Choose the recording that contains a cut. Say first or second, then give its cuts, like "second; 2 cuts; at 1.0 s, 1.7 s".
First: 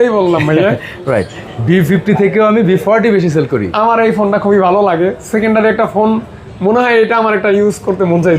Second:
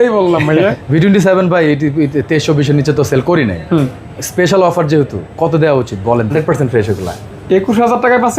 second; 2 cuts; at 0.8 s, 6.3 s